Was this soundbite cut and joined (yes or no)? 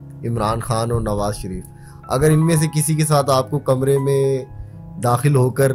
no